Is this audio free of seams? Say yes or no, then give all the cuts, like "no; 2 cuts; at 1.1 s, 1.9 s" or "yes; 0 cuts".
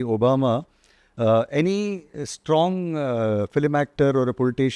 yes; 0 cuts